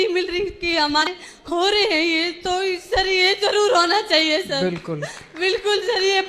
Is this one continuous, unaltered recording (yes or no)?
no